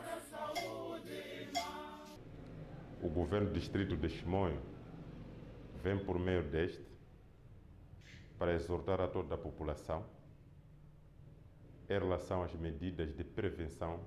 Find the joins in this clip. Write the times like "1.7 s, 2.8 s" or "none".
1.4 s